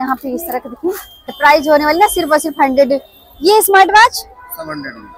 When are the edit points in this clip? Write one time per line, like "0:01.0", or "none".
0:01.3